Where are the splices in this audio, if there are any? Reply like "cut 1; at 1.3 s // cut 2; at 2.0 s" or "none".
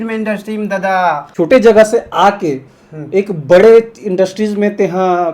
cut 1; at 1.2 s